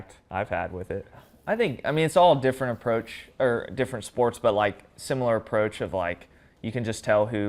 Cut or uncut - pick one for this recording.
cut